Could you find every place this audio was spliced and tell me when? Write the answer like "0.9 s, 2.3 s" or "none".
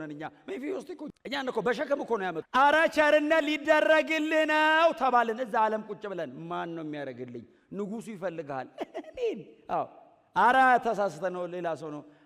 1.1 s, 2.4 s